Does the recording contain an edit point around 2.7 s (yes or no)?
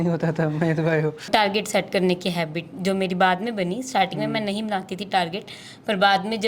no